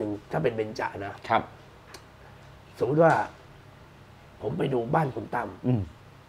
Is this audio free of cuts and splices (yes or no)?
yes